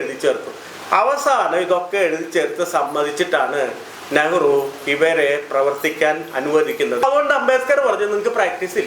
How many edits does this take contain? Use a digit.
1